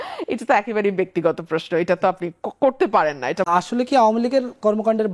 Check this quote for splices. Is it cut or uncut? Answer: cut